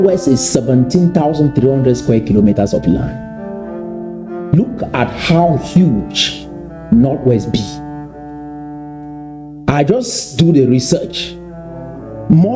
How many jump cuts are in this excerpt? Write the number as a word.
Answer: zero